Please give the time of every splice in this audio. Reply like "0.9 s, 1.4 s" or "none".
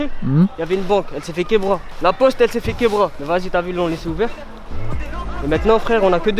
1.9 s, 3.2 s